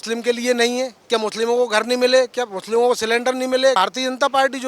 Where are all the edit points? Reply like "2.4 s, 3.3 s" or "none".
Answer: 1.0 s, 3.8 s